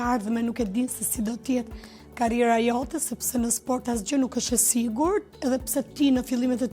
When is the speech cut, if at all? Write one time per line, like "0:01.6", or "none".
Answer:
none